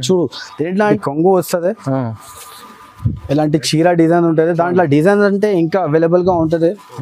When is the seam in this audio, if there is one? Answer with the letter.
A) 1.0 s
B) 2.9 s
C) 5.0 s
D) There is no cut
A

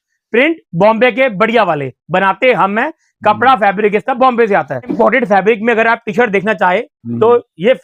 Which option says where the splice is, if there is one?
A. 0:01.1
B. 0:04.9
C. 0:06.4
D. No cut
B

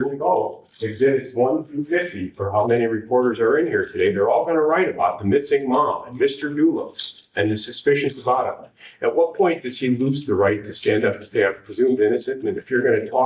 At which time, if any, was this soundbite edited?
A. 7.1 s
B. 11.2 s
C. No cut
C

